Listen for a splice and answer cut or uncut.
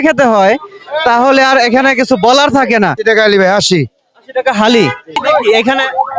cut